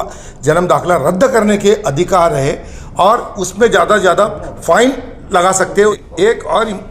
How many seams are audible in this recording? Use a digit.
1